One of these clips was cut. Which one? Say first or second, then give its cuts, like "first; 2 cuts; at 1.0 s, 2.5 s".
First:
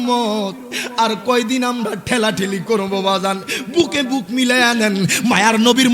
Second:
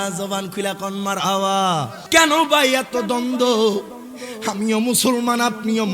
second; 1 cut; at 2.0 s